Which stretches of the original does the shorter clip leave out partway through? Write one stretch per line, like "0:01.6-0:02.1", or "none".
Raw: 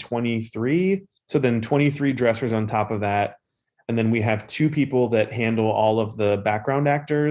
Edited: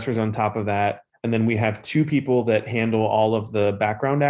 0:03.4-0:03.7

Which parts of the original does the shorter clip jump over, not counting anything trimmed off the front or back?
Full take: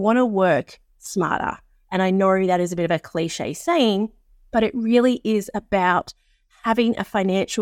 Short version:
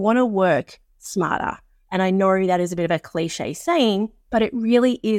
0:04.2-0:04.4

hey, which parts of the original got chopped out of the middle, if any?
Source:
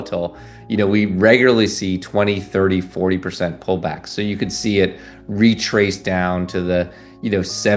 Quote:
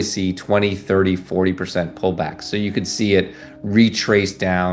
none

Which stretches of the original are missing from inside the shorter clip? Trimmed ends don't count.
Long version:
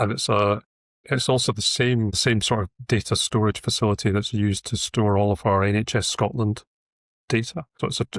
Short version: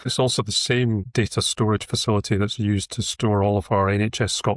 0:02.2-0:02.8

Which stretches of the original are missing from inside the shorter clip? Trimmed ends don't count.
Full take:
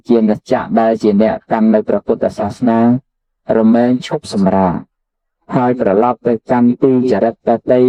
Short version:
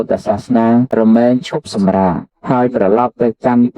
0:03.3-0:03.7
0:05.3-0:05.8

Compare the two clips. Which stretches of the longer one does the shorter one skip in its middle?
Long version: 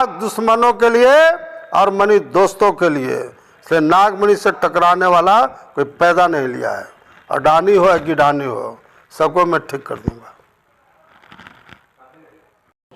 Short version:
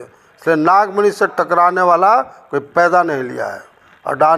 none

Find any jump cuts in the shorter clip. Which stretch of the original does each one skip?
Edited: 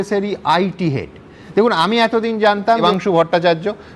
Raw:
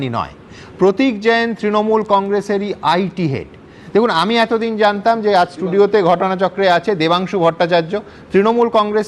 0:05.2-0:07.1

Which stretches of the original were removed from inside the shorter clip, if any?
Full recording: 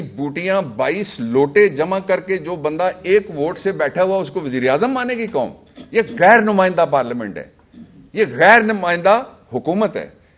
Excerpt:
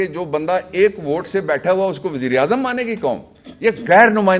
none

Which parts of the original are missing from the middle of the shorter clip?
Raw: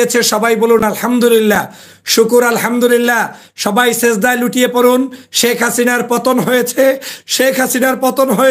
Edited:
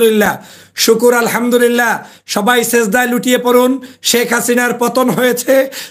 none

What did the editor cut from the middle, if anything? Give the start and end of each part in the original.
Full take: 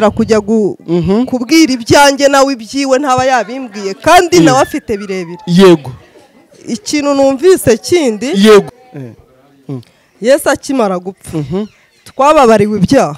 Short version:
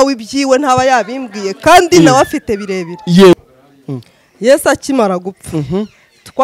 0:05.7-0:09.1

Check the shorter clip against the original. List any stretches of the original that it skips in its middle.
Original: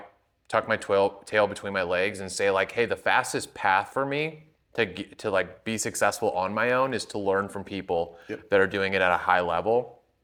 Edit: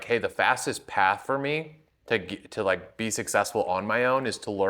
none

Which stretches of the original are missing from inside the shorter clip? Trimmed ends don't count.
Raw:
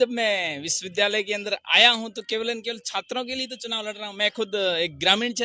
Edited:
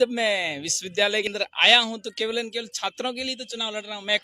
0:01.3-0:01.4

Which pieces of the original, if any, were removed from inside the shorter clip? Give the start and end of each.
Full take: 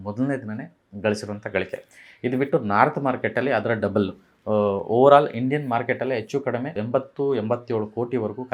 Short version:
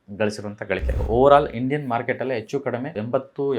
0:01.9-0:04.8

